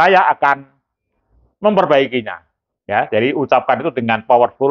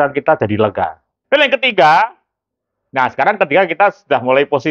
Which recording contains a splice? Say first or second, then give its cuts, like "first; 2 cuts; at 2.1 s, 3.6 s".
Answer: second; 1 cut; at 1.1 s